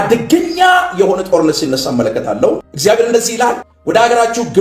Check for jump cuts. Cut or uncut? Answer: cut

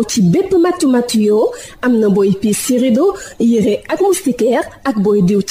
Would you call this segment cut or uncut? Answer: uncut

